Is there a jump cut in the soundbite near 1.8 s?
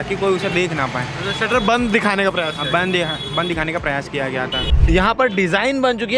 no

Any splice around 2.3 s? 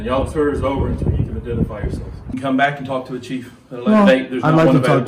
yes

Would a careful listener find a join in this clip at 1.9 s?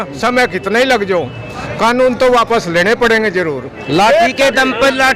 no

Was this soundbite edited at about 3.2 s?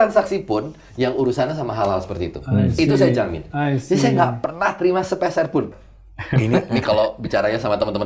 no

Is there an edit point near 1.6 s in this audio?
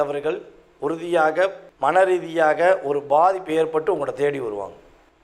yes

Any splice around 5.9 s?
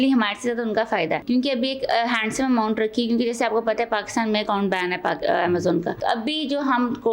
yes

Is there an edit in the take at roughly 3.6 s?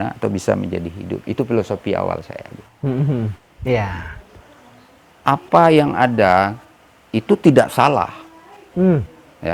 yes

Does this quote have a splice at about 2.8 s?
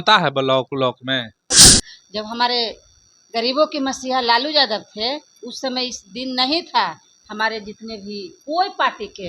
no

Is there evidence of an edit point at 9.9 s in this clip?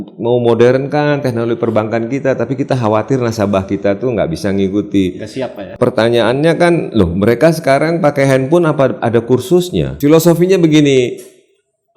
yes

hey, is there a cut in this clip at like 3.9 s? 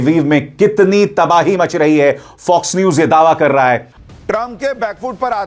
yes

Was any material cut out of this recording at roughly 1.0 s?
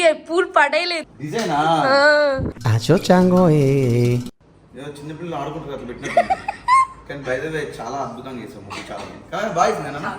yes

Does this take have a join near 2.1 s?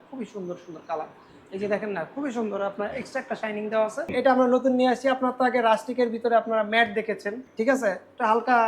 no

